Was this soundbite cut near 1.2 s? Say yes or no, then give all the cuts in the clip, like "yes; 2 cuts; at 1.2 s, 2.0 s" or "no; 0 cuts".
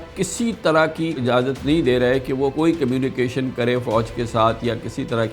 yes; 2 cuts; at 1.2 s, 2.5 s